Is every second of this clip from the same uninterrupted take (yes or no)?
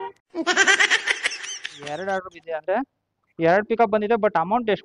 no